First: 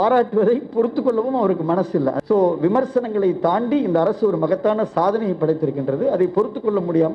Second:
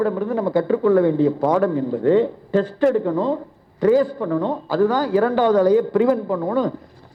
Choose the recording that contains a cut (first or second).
first